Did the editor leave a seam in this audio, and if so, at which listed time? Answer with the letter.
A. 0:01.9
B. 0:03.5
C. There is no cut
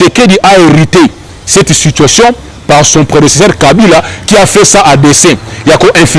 C